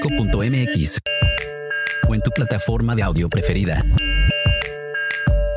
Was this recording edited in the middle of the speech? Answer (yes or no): yes